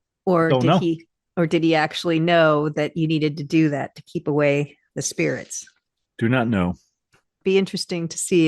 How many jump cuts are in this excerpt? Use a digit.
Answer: 1